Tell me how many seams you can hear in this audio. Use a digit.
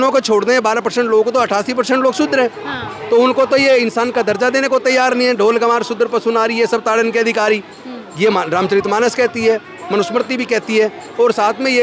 0